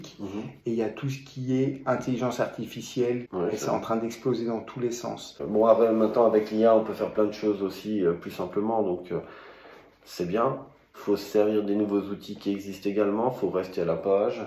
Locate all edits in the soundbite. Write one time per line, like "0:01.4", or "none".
0:05.4